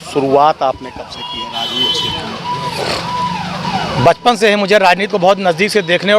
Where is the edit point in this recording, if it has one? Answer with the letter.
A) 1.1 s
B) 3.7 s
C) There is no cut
B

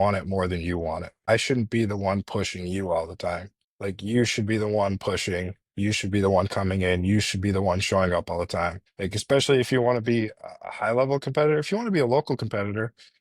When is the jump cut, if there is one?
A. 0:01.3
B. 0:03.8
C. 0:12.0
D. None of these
A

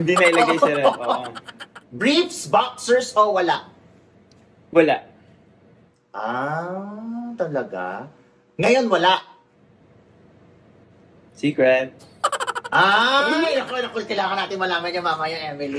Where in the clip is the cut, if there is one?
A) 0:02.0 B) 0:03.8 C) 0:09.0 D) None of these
A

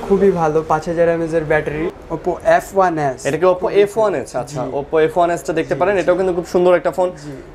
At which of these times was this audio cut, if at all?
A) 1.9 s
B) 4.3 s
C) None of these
A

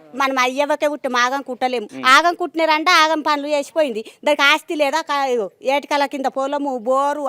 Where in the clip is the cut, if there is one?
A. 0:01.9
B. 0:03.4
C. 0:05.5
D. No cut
A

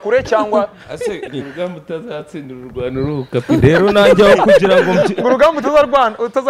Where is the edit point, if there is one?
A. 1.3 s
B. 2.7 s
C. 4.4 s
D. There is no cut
A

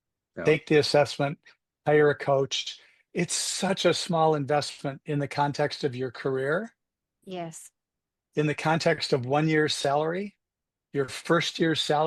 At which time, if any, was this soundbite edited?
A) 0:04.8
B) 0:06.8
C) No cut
C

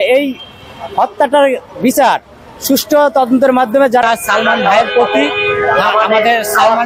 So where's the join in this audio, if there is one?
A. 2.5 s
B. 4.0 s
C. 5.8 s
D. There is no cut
B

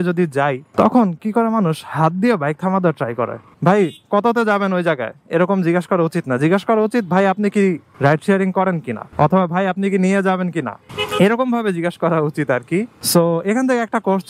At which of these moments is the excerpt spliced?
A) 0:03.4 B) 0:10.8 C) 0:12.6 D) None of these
A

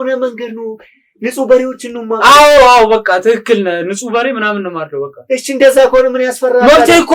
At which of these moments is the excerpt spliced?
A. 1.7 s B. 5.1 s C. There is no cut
C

